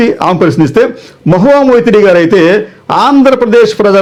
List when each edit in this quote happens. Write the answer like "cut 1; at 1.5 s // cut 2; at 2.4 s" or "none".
none